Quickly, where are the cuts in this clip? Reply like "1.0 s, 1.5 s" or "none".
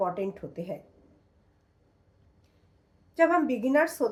none